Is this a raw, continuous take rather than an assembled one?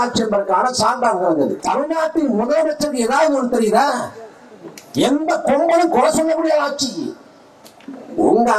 no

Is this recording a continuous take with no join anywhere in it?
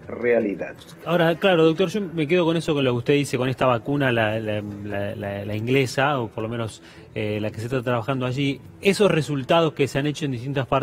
yes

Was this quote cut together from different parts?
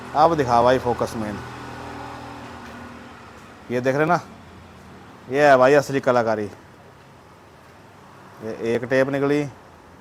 no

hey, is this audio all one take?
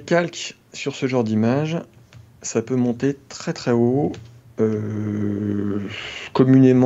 yes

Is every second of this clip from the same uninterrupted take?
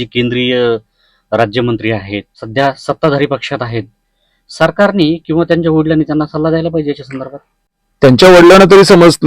no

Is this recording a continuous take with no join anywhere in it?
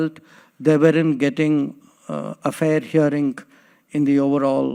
yes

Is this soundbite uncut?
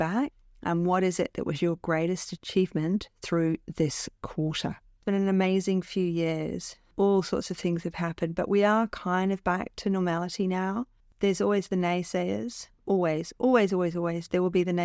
no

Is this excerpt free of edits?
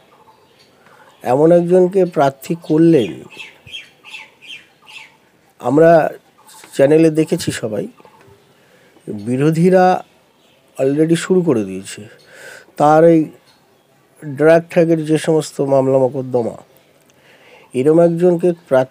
yes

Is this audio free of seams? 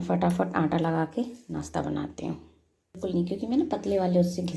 no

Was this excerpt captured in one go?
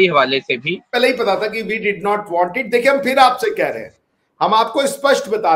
no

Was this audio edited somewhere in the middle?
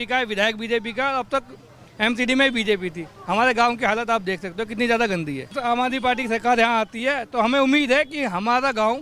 yes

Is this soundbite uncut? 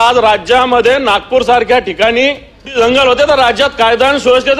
no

